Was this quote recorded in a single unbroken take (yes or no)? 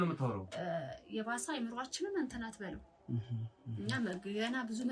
yes